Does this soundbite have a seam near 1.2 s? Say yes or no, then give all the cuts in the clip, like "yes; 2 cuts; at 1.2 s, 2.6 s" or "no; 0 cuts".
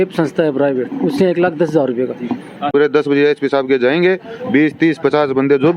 no; 1 cut; at 2.7 s